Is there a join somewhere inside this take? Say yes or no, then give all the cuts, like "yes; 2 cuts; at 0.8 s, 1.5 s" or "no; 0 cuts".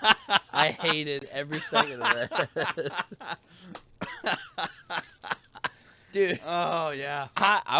no; 0 cuts